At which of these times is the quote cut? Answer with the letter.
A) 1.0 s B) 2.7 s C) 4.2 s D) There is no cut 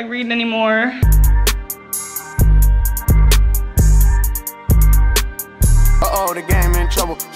A